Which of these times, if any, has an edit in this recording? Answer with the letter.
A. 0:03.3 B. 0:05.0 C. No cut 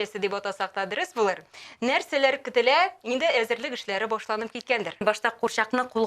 B